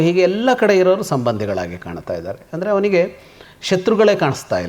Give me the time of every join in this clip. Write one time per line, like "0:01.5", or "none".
none